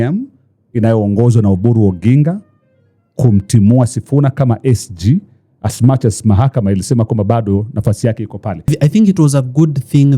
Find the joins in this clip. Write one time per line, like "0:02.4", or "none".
0:08.7